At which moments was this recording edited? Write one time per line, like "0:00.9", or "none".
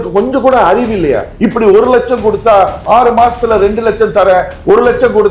0:01.3